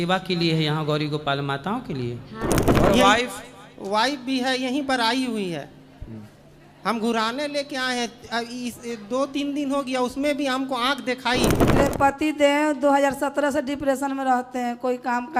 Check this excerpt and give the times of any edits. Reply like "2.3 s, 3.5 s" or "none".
2.6 s, 11.7 s